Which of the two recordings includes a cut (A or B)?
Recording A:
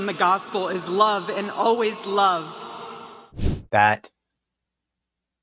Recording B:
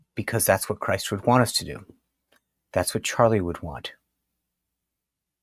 A